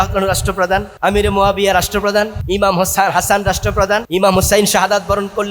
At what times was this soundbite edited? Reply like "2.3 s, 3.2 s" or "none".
0.9 s, 2.4 s, 4.1 s